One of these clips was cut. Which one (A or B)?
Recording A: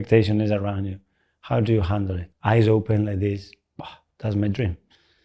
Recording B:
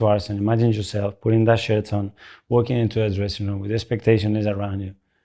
A